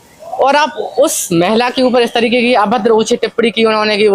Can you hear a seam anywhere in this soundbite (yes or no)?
no